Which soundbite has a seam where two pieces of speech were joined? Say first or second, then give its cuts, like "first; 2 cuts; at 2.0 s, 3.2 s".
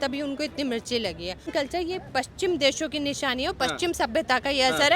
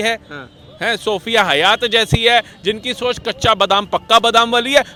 first; 1 cut; at 1.5 s